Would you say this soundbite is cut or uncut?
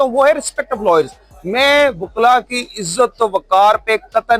uncut